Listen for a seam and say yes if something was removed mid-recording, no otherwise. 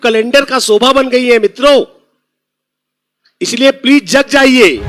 no